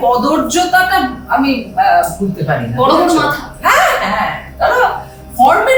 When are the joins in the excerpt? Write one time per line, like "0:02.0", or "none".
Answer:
none

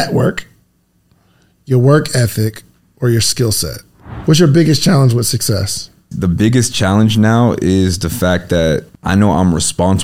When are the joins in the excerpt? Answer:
0:04.1
0:06.1
0:08.9

